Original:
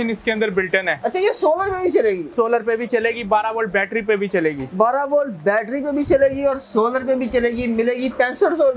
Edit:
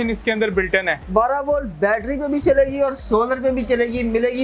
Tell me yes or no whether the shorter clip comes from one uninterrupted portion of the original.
no